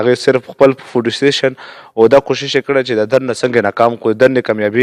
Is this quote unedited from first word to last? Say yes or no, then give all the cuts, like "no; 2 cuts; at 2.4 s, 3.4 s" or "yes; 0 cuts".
yes; 0 cuts